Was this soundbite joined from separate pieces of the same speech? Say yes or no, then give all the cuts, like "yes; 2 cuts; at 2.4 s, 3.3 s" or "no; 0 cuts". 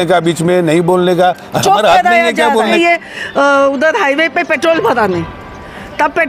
yes; 1 cut; at 2.6 s